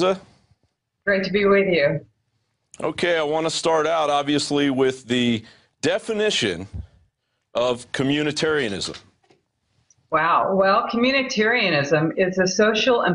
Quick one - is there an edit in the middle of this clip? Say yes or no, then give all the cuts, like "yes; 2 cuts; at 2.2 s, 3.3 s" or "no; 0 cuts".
no; 0 cuts